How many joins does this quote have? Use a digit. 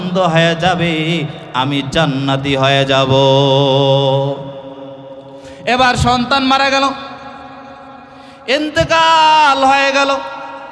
0